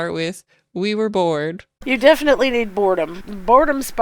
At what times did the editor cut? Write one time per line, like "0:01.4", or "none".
0:01.7
0:03.1